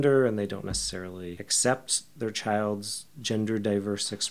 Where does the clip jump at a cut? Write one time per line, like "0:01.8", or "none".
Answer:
none